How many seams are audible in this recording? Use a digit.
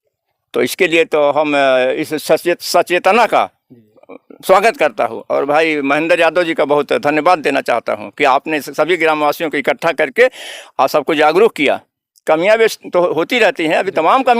0